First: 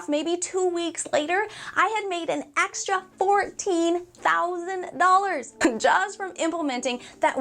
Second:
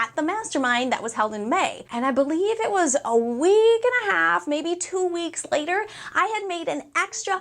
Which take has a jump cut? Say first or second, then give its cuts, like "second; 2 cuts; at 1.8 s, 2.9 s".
first; 1 cut; at 5.5 s